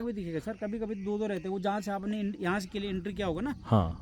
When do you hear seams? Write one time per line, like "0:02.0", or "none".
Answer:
none